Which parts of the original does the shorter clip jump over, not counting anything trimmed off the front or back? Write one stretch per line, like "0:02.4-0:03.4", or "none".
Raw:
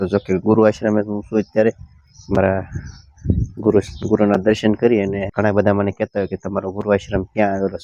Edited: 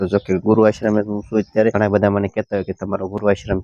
0:01.7-0:05.4